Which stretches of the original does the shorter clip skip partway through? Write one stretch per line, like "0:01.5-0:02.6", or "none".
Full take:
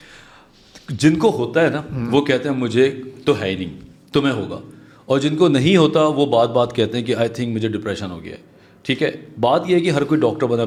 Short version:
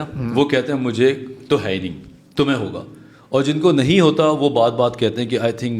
none